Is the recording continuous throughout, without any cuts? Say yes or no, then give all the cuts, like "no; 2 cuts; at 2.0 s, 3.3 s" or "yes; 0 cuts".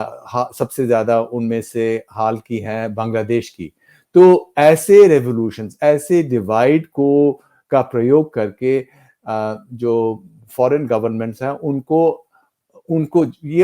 yes; 0 cuts